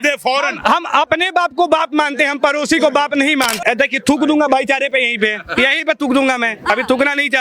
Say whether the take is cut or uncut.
cut